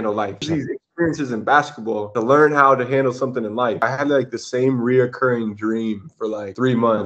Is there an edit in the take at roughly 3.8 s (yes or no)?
yes